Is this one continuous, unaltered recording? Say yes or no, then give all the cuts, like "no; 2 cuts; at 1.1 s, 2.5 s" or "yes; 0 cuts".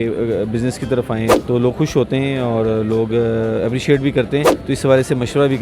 no; 2 cuts; at 1.4 s, 4.5 s